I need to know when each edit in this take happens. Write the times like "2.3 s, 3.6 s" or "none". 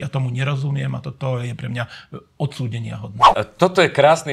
3.3 s